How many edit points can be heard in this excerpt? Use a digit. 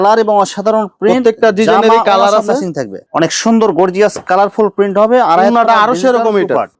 1